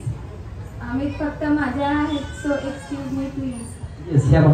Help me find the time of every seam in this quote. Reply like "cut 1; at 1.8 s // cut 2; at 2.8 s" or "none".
none